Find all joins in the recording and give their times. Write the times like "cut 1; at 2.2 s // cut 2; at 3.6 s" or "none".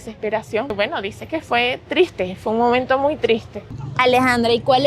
cut 1; at 0.7 s // cut 2; at 3.6 s